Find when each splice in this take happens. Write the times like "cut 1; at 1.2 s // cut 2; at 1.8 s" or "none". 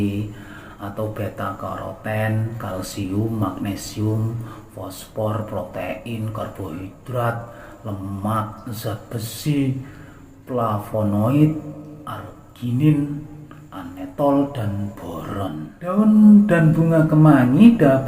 cut 1; at 15.7 s